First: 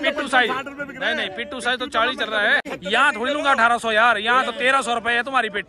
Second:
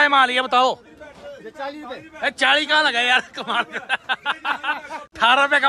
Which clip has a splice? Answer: first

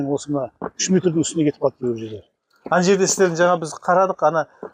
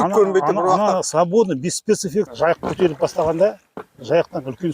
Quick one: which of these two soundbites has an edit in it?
second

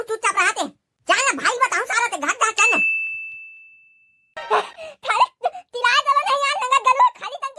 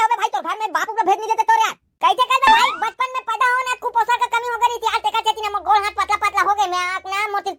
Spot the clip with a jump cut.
first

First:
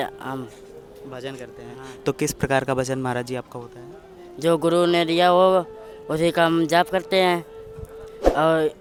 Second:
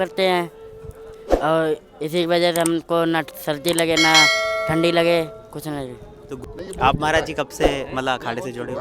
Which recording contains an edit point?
second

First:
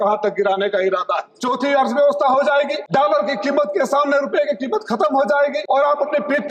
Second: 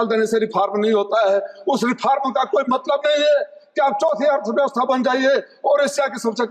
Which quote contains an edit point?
first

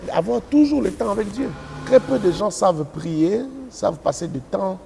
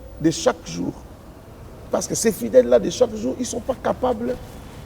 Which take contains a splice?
first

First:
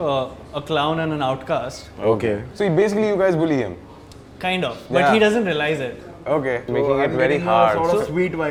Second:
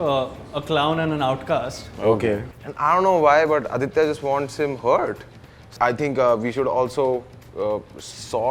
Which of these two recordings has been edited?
second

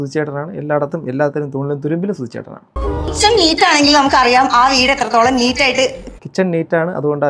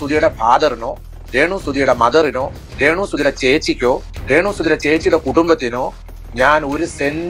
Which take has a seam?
first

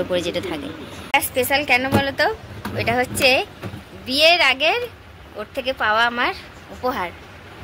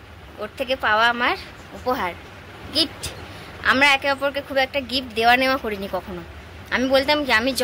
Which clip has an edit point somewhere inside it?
first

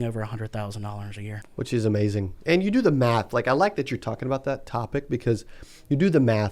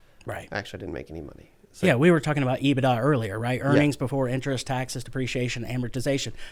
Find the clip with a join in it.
first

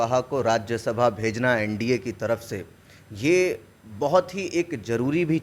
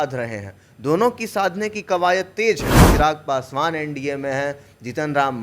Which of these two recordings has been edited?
second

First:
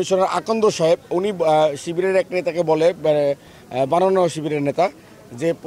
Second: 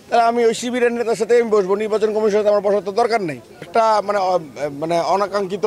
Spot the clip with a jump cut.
second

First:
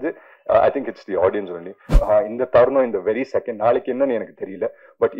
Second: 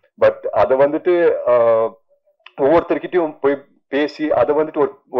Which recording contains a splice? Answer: first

